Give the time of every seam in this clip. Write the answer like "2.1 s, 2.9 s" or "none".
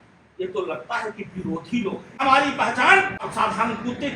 2.1 s, 3.3 s

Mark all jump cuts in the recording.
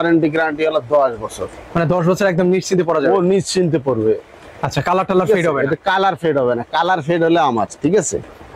none

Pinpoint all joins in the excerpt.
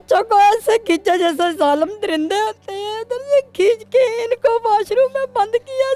none

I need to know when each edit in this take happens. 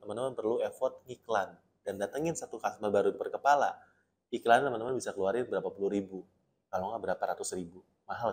none

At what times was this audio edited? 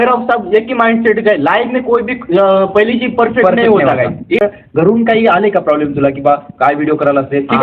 4.4 s

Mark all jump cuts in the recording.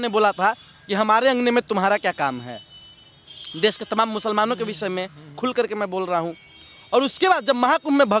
none

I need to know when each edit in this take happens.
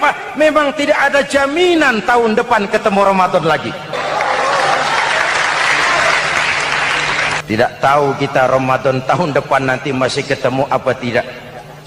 4.0 s, 7.4 s

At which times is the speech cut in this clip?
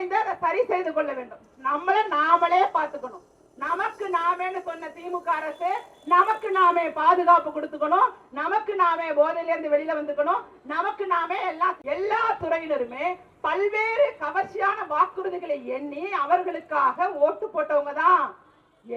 11.8 s

